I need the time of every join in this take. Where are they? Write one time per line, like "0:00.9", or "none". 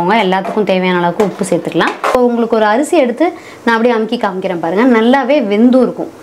0:02.1